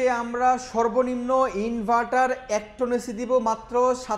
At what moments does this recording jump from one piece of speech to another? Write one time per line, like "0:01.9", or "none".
none